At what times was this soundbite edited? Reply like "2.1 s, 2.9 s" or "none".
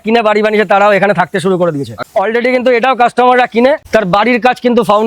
2.0 s